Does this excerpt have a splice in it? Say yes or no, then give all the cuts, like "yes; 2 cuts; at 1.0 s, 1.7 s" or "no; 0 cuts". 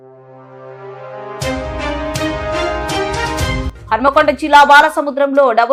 no; 0 cuts